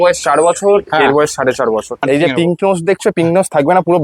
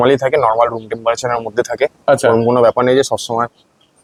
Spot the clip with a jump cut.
first; 1 cut; at 2.1 s

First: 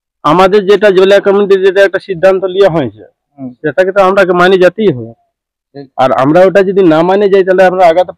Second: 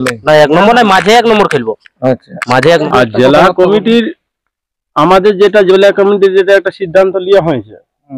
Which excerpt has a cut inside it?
second; 1 cut; at 2.8 s

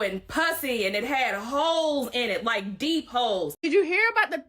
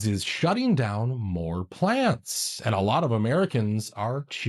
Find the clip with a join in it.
first; 1 cut; at 3.5 s

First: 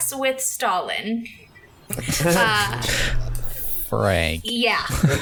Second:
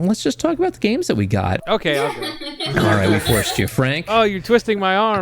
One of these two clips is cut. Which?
second; 1 cut; at 1.6 s

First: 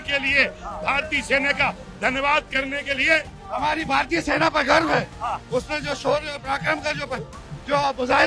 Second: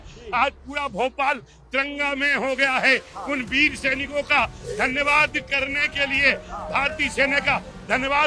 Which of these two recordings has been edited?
first; 1 cut; at 3.4 s

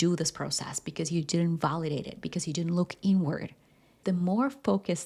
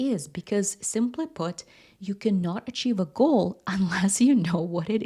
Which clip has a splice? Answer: first; 1 cut; at 4.0 s

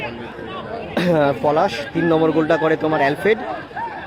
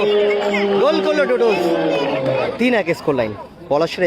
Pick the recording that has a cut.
second; 1 cut; at 2.5 s

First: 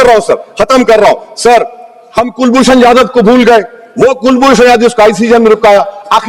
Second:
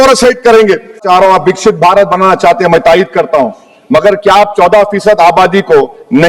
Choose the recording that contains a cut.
second; 1 cut; at 1.0 s

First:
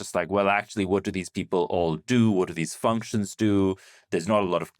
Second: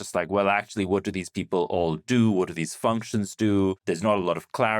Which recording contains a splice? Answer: second; 1 cut; at 3.8 s

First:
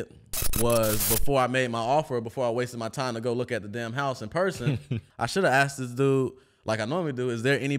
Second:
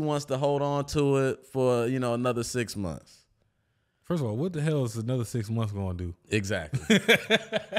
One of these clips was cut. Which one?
first; 1 cut; at 5.0 s

